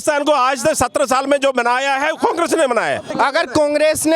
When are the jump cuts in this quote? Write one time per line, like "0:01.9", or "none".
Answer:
0:03.1